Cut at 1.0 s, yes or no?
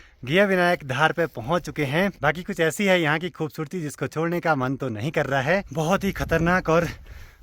no